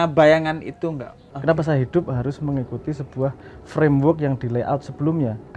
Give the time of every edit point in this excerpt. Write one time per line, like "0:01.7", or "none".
0:01.3